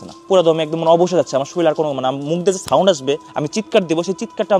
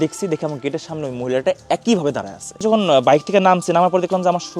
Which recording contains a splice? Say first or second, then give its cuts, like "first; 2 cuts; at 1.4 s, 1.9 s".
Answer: second; 1 cut; at 2.6 s